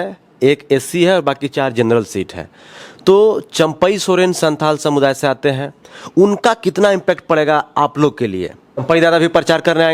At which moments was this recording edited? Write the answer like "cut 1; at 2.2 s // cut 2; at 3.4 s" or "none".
cut 1; at 8.8 s